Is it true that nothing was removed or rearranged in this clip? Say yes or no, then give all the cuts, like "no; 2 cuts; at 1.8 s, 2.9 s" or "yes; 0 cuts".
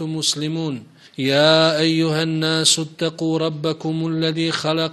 no; 1 cut; at 1.0 s